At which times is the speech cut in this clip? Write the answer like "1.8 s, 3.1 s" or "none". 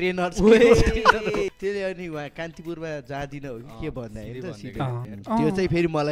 1.5 s, 5.1 s